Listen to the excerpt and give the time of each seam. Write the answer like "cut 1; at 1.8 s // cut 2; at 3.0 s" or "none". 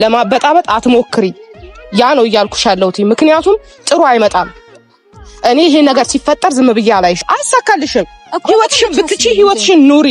cut 1; at 7.2 s